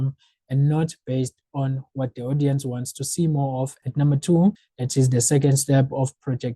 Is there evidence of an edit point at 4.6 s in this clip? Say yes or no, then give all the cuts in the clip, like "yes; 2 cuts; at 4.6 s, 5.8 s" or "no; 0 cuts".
yes; 2 cuts; at 3.8 s, 4.6 s